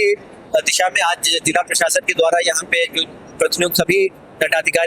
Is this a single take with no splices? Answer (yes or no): yes